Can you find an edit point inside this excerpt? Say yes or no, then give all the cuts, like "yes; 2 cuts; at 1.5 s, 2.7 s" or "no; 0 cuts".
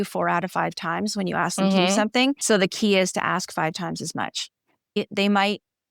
yes; 1 cut; at 5.0 s